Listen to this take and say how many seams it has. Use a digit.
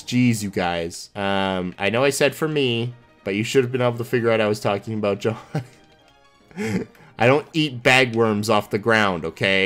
1